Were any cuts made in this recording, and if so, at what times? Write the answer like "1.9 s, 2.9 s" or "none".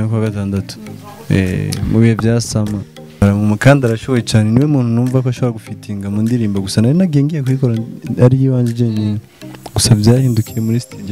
3.2 s